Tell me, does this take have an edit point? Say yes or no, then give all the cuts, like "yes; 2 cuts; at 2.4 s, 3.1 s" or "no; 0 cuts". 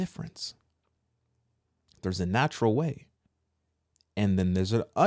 no; 0 cuts